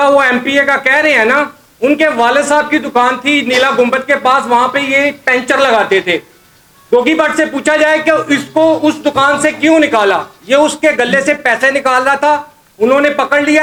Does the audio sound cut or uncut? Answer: uncut